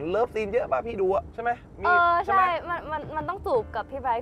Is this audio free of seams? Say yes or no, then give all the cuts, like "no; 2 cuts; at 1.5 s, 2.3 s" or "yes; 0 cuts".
yes; 0 cuts